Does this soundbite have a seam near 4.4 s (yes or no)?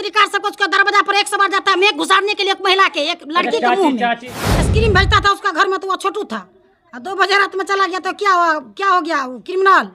yes